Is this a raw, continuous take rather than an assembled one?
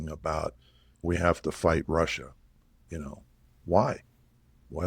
no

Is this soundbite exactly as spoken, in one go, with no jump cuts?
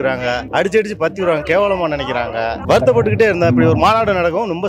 no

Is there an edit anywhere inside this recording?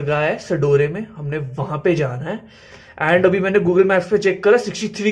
no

